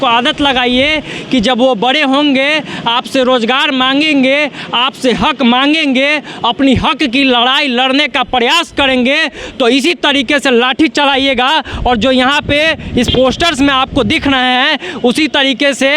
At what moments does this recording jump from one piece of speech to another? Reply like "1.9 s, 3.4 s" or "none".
none

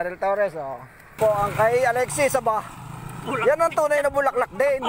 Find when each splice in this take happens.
1.2 s

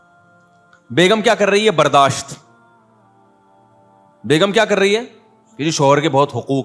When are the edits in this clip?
2.7 s, 4.1 s

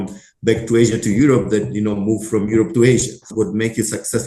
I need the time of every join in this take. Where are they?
3.3 s

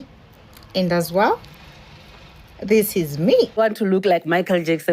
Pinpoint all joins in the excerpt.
3.6 s

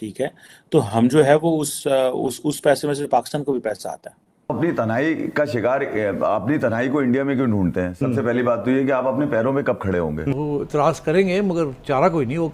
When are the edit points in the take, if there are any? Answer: 4.5 s, 10.3 s

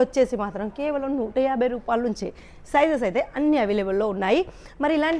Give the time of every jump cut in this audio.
none

